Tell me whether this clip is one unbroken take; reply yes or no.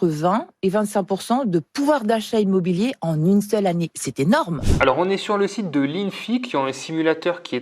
no